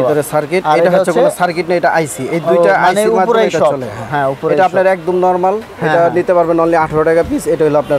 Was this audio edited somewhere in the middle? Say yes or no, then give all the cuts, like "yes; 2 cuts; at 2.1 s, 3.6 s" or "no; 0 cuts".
no; 0 cuts